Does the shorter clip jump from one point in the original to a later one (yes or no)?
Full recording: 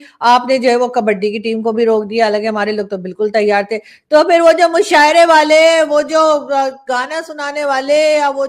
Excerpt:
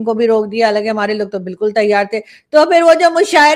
no